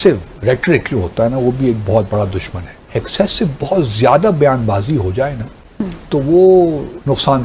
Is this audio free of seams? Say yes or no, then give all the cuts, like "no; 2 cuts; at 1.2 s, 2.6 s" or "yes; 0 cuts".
yes; 0 cuts